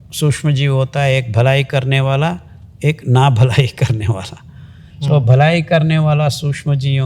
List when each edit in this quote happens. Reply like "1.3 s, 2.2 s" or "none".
none